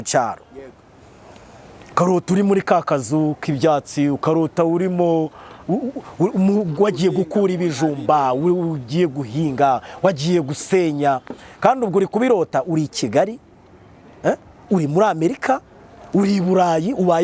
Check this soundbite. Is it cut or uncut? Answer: uncut